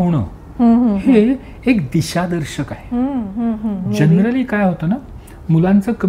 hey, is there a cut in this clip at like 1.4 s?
no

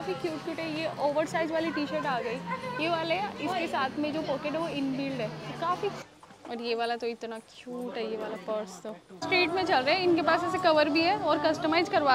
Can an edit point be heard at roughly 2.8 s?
no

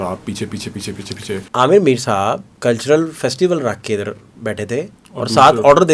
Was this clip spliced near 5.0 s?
yes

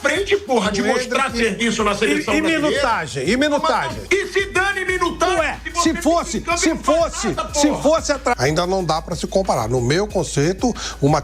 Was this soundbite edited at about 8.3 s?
yes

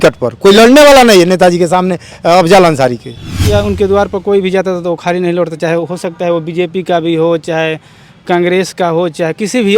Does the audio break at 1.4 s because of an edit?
no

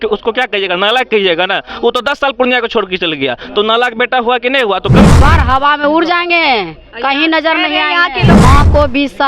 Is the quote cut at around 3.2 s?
no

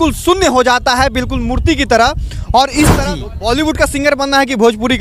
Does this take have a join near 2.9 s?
yes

